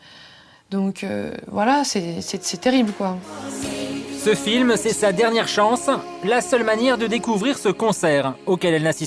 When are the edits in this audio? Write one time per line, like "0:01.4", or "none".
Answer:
0:03.5